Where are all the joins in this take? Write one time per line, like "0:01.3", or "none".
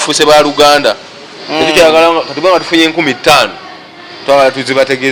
none